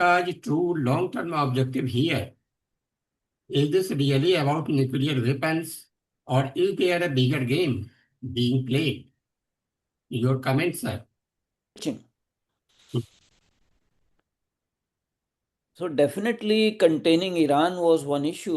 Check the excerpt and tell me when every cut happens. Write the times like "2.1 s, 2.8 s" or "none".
11.8 s